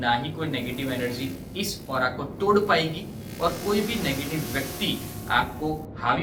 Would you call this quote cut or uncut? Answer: uncut